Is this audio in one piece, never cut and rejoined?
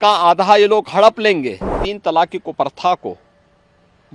no; 1 cut; at 1.9 s

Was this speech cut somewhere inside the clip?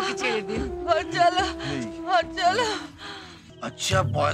yes; 1 cut; at 3.4 s

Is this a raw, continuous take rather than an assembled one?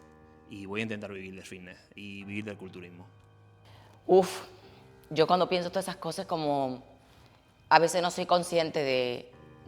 yes; 0 cuts

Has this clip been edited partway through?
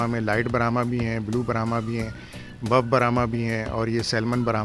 no; 0 cuts

